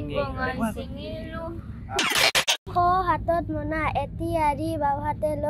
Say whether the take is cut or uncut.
cut